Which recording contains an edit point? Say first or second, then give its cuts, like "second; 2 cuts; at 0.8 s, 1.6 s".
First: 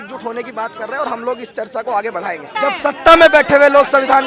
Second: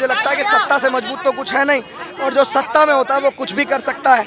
first; 1 cut; at 2.5 s